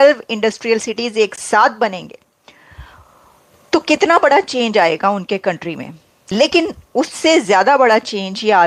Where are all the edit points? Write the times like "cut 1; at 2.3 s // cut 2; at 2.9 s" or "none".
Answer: none